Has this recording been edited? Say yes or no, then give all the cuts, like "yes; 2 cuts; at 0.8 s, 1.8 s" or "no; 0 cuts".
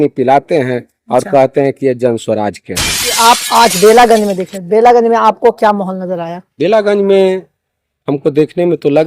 yes; 1 cut; at 3.2 s